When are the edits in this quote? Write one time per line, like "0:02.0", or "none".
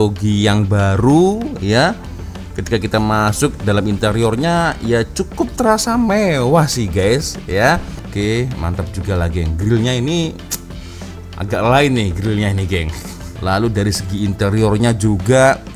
0:08.0
0:13.3